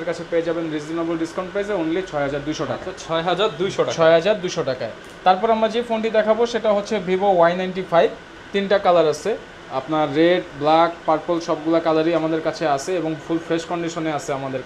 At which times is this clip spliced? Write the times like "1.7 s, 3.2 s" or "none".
none